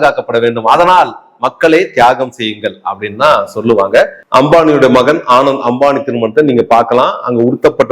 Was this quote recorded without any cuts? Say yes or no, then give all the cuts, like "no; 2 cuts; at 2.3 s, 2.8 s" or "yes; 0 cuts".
no; 1 cut; at 4.2 s